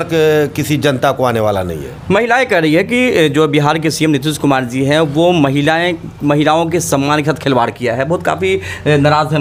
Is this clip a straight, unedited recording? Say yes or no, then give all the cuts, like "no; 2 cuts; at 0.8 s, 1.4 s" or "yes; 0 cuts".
yes; 0 cuts